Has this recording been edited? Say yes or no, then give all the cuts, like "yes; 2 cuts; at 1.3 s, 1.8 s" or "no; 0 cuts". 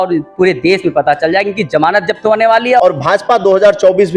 yes; 1 cut; at 2.8 s